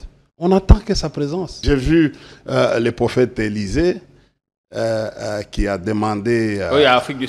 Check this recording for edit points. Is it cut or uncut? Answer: cut